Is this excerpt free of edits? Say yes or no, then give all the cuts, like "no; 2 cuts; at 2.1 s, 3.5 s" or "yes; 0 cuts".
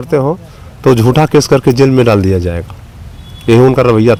yes; 0 cuts